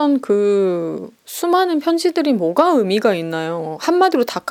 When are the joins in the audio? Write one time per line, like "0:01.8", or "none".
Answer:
none